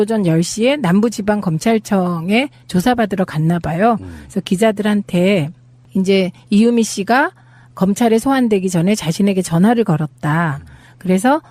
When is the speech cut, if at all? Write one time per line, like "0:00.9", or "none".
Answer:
0:04.7